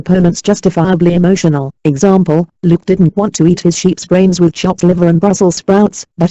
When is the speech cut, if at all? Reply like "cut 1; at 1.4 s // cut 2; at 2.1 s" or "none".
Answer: cut 1; at 3.8 s